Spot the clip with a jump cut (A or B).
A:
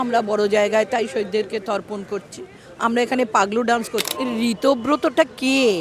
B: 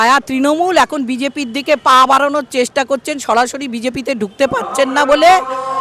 A